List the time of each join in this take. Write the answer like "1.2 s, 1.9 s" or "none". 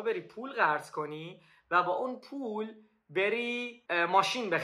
3.7 s